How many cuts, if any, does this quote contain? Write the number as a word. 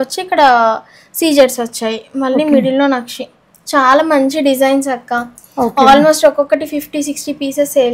zero